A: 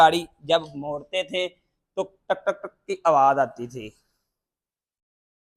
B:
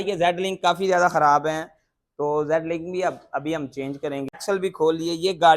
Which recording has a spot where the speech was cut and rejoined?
B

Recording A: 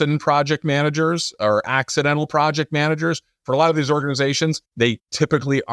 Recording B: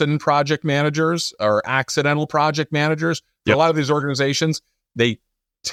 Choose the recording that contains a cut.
A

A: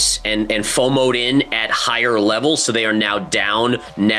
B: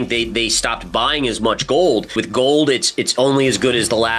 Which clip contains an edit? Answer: B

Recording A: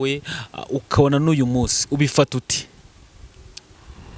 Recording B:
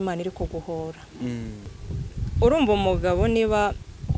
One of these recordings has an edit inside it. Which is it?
B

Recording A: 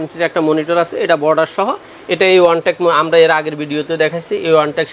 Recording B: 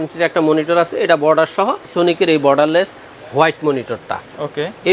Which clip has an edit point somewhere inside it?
B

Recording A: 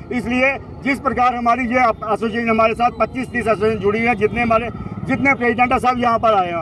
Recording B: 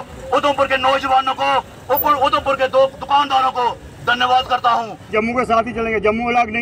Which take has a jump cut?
B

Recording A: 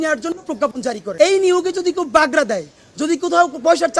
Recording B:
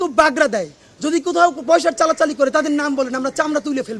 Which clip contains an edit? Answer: A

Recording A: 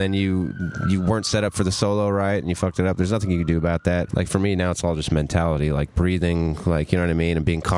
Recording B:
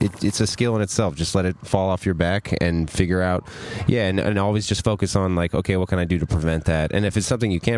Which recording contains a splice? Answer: A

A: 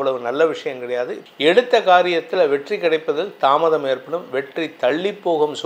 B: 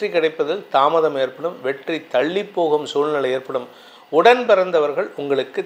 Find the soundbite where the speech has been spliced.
A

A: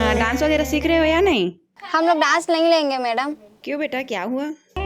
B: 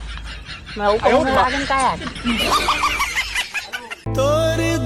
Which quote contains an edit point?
B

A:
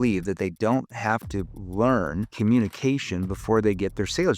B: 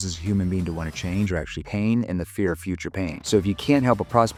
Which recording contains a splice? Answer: A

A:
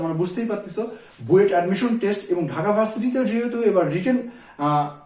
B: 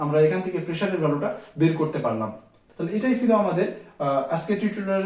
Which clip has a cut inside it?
B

